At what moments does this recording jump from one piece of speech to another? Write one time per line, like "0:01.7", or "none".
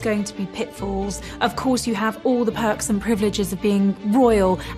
none